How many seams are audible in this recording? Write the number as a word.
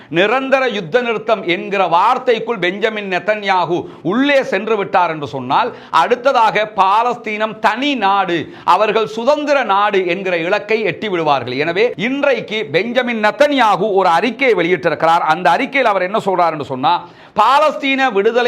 one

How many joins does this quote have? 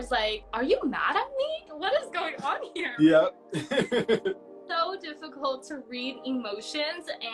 one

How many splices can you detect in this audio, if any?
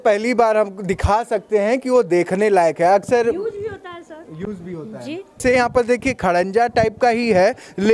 one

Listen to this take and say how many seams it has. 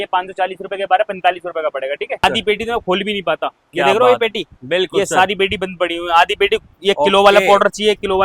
one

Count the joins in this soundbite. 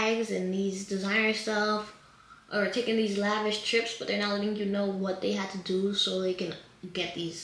zero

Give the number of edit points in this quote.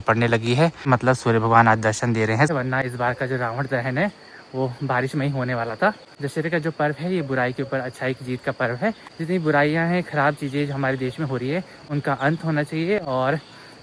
three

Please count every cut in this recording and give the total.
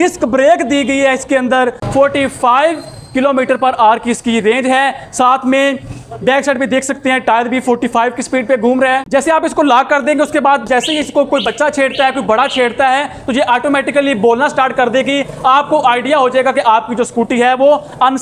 two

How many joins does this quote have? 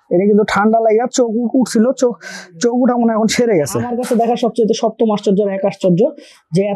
one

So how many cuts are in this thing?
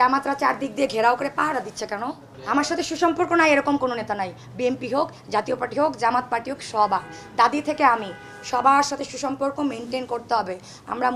one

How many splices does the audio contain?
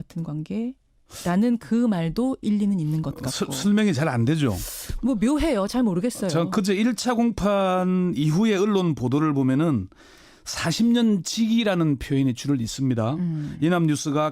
one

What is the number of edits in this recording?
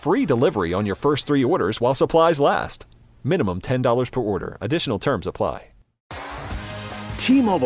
one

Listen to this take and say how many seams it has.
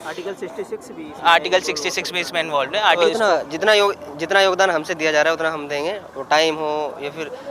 one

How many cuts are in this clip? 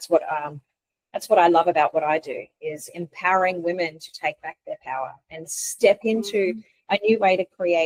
zero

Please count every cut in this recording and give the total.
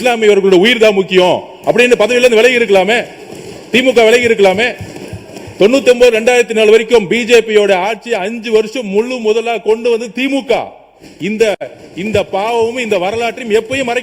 zero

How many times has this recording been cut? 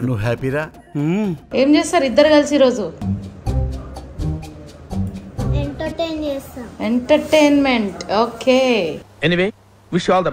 two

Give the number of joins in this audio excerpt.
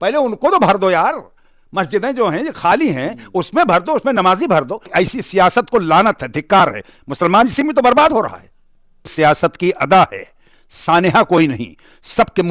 two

